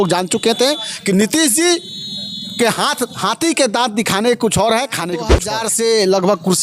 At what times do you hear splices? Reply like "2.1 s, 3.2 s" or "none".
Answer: 5.4 s